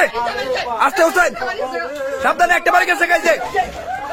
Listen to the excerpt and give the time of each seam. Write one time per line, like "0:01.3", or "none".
none